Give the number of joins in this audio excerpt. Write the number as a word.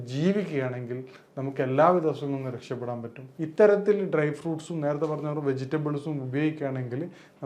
one